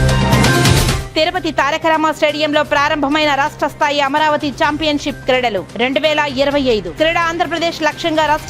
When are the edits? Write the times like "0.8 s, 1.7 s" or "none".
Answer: 1.0 s